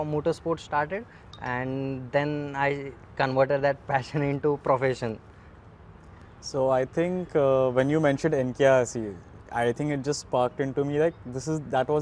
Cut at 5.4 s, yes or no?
no